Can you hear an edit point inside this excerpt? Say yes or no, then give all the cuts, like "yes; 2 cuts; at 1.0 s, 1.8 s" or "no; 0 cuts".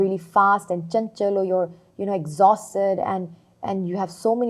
no; 0 cuts